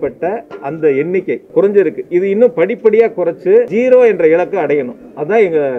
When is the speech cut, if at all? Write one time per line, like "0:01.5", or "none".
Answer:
0:01.4
0:03.7